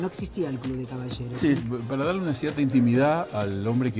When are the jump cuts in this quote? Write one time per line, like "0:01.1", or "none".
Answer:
0:01.6